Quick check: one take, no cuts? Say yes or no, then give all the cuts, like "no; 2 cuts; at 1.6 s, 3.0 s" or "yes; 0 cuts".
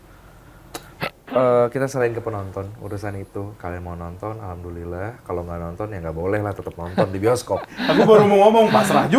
yes; 0 cuts